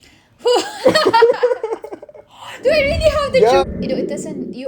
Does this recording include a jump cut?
yes; 1 cut; at 3.6 s

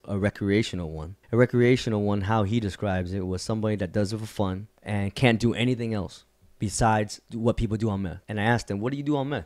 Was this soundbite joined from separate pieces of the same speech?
yes; 4 cuts; at 1.1 s, 4.7 s, 7.2 s, 8.2 s

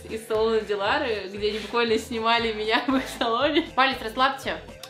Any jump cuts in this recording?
yes; 1 cut; at 3.7 s

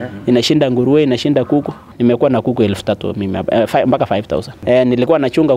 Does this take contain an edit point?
yes; 2 cuts; at 1.9 s, 4.6 s

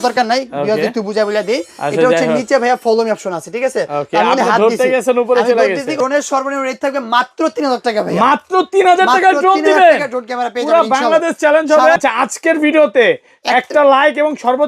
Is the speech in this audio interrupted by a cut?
yes; 2 cuts; at 6.0 s, 12.0 s

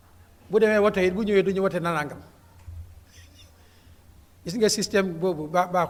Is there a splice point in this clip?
no; 0 cuts

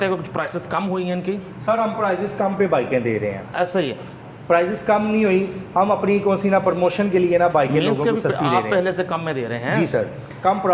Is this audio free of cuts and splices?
yes; 0 cuts

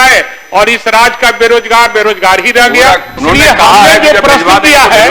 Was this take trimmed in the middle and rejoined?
yes; 1 cut; at 3.1 s

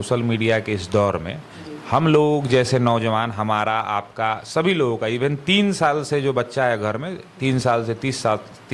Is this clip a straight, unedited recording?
yes; 0 cuts

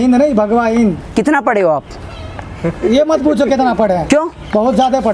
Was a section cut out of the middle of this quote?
no; 0 cuts

